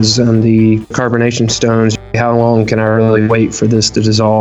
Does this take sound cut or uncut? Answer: cut